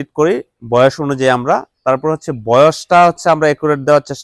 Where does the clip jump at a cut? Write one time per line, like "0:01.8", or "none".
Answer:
none